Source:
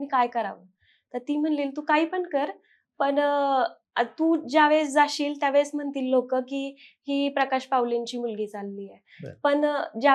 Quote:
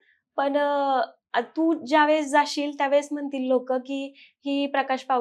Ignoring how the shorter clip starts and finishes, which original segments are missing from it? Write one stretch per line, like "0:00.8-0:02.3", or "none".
none